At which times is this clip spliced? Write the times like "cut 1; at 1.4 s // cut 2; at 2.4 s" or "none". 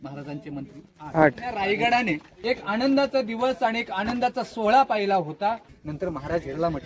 cut 1; at 1.6 s // cut 2; at 2.3 s // cut 3; at 5.7 s